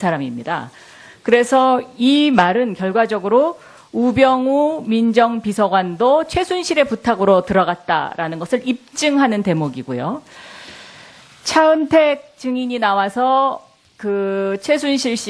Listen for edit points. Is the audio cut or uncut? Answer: uncut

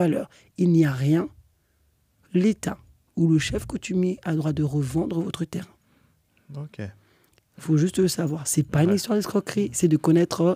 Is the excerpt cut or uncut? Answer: uncut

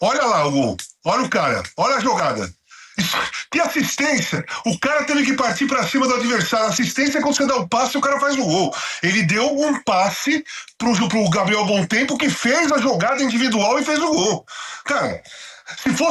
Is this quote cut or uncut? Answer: uncut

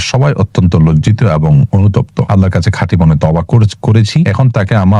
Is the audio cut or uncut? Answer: cut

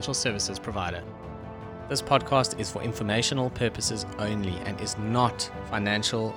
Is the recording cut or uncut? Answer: cut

